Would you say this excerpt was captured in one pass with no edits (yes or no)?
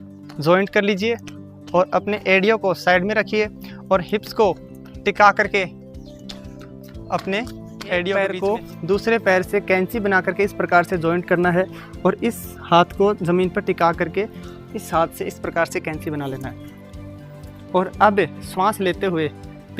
no